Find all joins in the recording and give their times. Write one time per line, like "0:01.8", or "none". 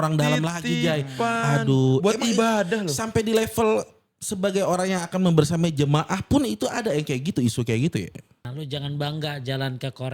0:08.5